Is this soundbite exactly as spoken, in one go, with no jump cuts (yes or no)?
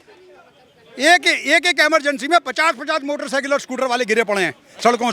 yes